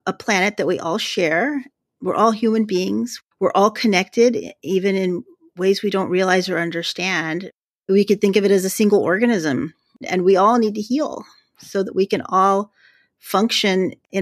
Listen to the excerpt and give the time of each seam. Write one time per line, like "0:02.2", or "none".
none